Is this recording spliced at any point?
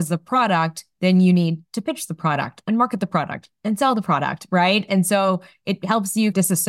no; 0 cuts

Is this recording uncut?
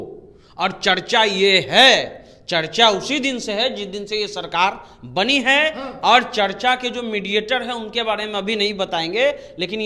yes; 0 cuts

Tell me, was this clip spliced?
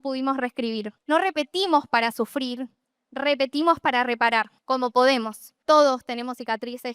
yes; 2 cuts; at 0.9 s, 5.5 s

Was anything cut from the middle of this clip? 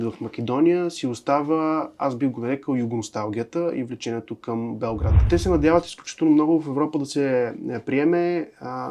yes; 1 cut; at 5.3 s

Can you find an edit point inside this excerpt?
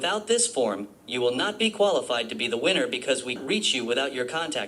yes; 1 cut; at 3.4 s

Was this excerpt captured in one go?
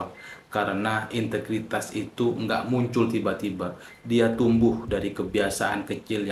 yes; 0 cuts

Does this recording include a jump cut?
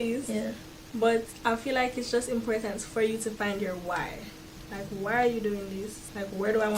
no; 0 cuts

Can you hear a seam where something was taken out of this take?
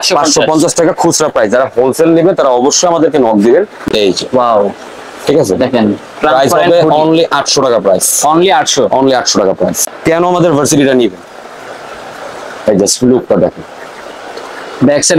yes; 2 cuts; at 3.8 s, 9.8 s

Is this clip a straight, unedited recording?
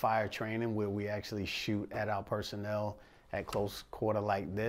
yes; 0 cuts

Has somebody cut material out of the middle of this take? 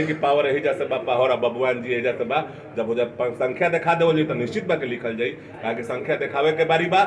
no; 0 cuts

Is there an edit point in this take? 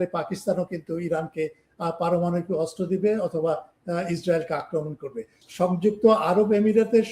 yes; 1 cut; at 5.4 s

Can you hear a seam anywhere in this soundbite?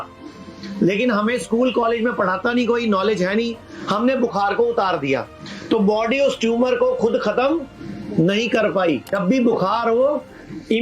yes; 1 cut; at 9.2 s

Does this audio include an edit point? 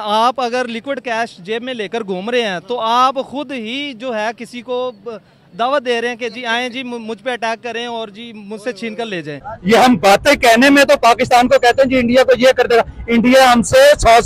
yes; 1 cut; at 9.5 s

